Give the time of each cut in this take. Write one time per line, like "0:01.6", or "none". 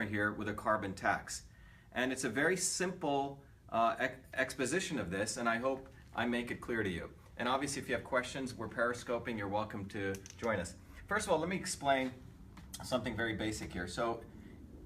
0:08.6

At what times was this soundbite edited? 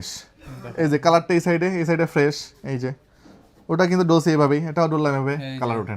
none

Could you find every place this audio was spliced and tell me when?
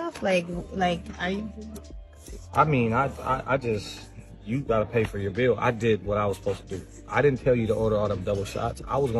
none

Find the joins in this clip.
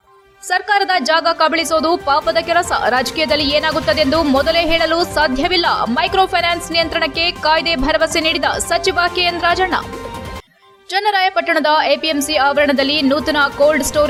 none

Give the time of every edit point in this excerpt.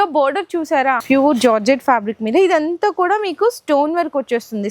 0:01.0

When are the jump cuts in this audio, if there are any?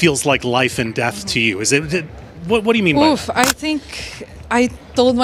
0:02.9

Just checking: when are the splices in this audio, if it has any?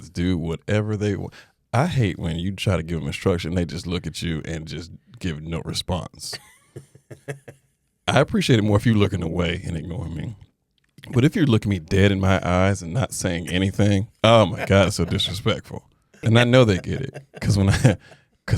0:16.1

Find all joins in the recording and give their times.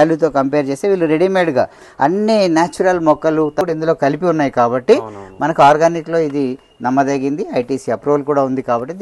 0:03.6

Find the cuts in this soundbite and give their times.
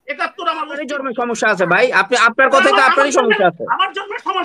0:01.0

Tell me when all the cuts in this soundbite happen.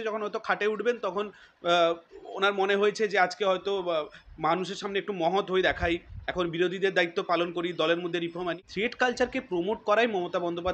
0:08.7

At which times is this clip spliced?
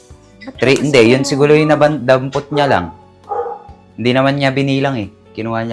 none

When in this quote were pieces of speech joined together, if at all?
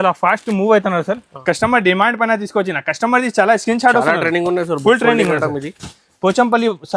0:01.3

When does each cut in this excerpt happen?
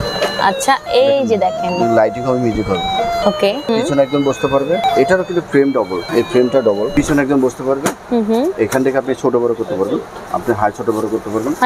0:03.7
0:04.8
0:06.0
0:06.9

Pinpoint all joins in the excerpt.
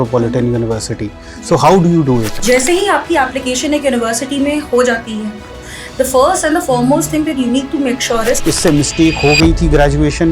0:02.3
0:08.4

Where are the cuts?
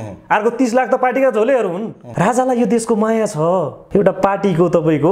0:02.0
0:03.8

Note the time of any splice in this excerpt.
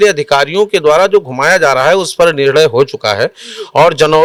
none

